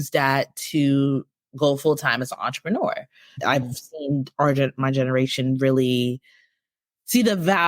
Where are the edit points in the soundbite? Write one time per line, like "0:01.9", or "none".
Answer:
0:03.2